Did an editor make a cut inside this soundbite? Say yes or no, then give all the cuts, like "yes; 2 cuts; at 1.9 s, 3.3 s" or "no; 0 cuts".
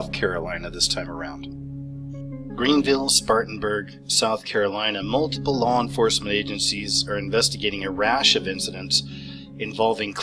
yes; 1 cut; at 5.9 s